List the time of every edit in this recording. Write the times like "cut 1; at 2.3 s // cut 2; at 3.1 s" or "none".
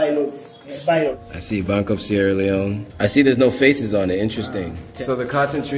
cut 1; at 1.2 s // cut 2; at 2.8 s // cut 3; at 4.8 s